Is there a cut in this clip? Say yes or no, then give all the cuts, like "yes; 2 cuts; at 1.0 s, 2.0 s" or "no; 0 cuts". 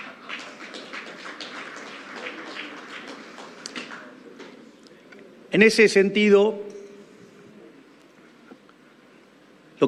no; 0 cuts